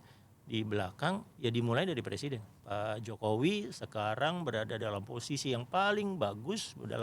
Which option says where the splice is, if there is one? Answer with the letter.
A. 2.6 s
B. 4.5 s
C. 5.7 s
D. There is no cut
A